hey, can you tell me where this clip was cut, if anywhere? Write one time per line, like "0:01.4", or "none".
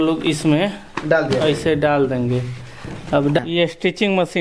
0:03.4